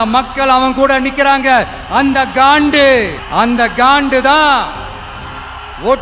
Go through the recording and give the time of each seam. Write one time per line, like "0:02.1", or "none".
0:03.2